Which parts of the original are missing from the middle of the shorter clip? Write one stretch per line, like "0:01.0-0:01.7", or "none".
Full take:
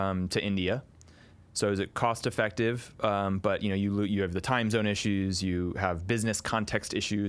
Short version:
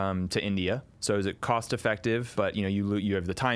0:00.9-0:01.4
0:02.9-0:03.4